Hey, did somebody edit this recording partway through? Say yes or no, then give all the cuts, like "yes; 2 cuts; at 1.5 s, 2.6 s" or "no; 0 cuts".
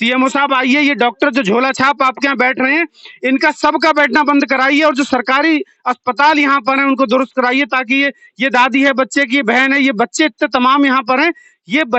no; 0 cuts